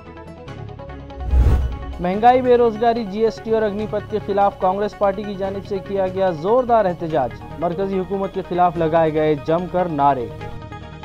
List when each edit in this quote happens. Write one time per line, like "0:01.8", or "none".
0:01.6